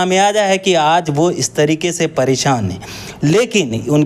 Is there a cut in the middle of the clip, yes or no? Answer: no